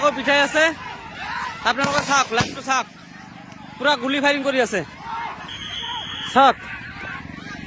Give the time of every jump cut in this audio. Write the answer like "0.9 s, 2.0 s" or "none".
5.2 s